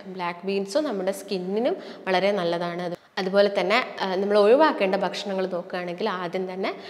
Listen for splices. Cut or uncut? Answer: cut